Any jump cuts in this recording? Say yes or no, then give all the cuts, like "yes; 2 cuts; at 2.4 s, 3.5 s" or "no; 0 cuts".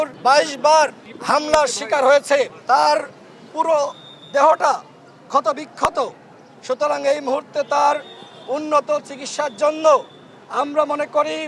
no; 0 cuts